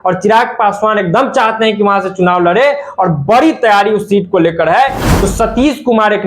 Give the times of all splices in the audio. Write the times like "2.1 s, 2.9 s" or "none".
5.0 s